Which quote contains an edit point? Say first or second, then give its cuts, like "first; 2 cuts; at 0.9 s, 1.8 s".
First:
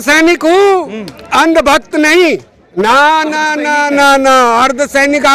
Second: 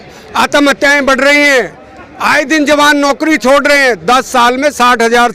first; 1 cut; at 2.8 s